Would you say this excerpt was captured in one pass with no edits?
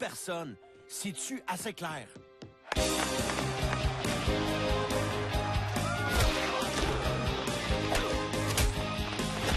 yes; 0 cuts

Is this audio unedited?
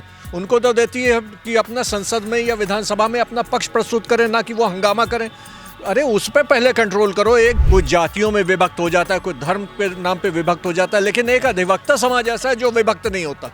no; 1 cut; at 7.6 s

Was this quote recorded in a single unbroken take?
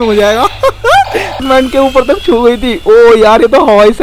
no; 1 cut; at 1.4 s

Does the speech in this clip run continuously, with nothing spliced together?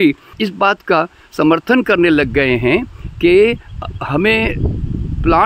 yes; 0 cuts

